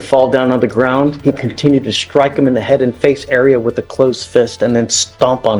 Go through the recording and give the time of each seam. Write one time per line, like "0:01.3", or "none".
none